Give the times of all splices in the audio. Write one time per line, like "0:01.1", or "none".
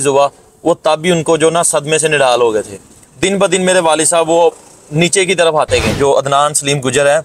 0:05.9